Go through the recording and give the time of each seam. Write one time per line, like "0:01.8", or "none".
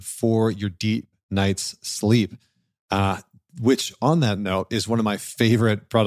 none

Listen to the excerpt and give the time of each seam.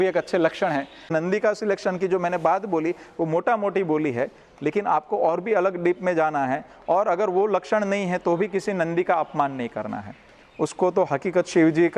0:01.1

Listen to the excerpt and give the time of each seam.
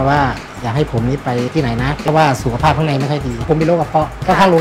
0:02.0
0:03.5

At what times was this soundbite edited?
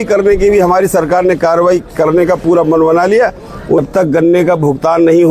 0:03.8

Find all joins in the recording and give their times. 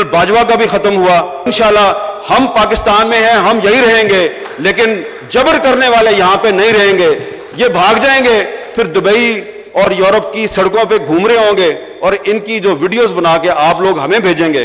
0:01.4

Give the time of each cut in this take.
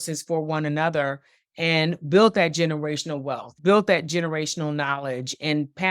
0:03.5

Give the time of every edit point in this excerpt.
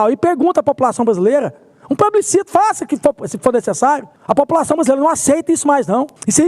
0:04.1

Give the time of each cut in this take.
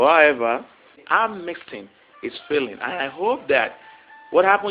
0:01.0

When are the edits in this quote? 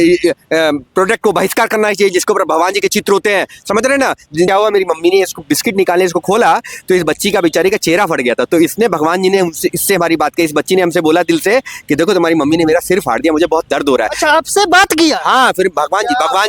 0:04.5

